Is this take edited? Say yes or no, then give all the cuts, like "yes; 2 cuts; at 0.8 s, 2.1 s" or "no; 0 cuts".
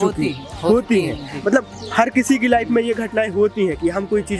no; 0 cuts